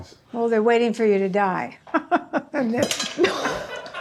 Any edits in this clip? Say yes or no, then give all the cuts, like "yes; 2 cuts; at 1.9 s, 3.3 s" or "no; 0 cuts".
no; 0 cuts